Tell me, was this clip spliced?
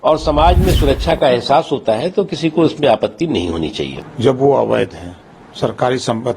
no; 0 cuts

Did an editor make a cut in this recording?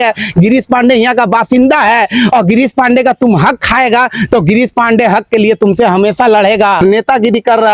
no; 0 cuts

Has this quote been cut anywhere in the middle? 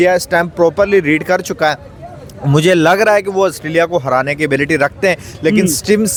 no; 0 cuts

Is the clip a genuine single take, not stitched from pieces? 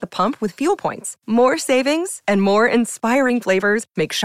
yes; 0 cuts

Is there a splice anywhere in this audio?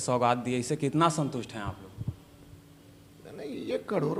no; 0 cuts

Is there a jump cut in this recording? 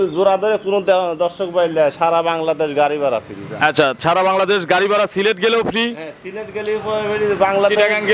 no; 0 cuts

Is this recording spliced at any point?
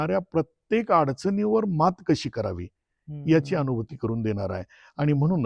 no; 0 cuts

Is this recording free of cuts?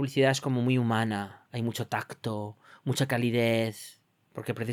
yes; 0 cuts

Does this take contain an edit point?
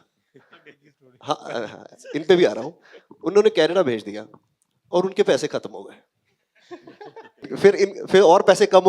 yes; 1 cut; at 7.5 s

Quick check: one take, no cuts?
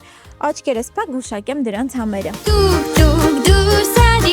no; 1 cut; at 2.3 s

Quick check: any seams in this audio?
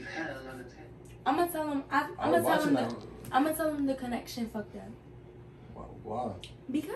no; 0 cuts

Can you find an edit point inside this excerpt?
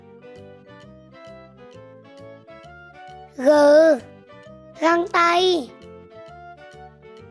no; 0 cuts

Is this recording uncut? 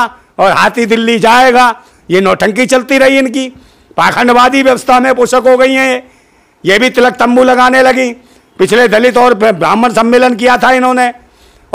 yes; 0 cuts

